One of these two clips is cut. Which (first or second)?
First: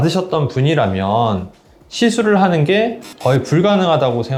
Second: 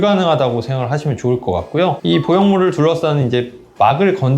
second